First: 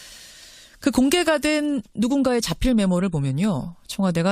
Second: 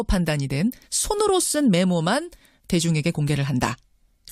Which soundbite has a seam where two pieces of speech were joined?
first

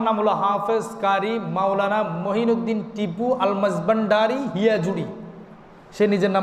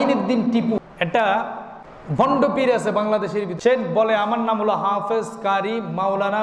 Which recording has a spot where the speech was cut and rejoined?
second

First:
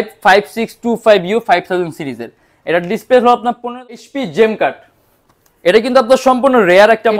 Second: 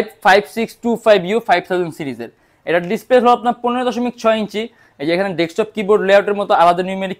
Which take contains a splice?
first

